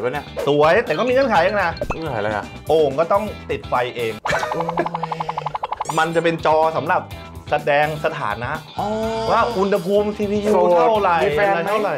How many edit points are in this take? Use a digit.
2